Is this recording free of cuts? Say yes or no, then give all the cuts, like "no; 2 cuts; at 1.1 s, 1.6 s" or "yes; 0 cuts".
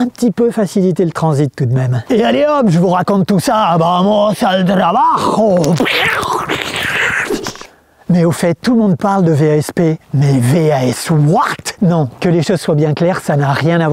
yes; 0 cuts